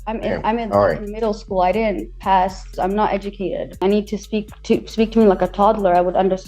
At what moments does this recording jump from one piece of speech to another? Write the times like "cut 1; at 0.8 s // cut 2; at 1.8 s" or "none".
cut 1; at 2.7 s // cut 2; at 3.8 s